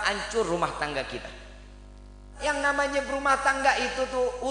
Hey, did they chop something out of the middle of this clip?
yes; 1 cut; at 2.4 s

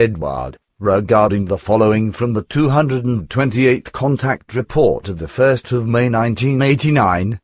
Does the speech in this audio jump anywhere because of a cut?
yes; 1 cut; at 6.5 s

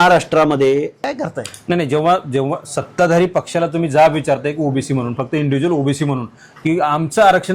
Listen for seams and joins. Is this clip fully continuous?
no; 1 cut; at 1.1 s

